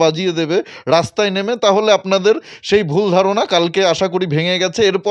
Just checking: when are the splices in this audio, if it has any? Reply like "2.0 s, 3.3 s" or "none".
none